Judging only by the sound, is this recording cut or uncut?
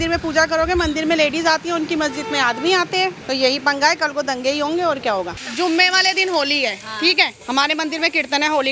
cut